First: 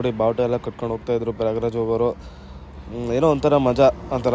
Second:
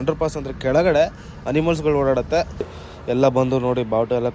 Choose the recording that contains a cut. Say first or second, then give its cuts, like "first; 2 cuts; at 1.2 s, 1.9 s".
second; 1 cut; at 2.8 s